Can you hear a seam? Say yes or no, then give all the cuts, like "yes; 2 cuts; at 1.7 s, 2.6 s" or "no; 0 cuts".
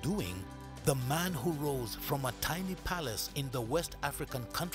no; 0 cuts